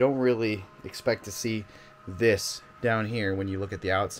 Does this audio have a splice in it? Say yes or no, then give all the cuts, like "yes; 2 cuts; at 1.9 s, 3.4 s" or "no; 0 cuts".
yes; 1 cut; at 2.6 s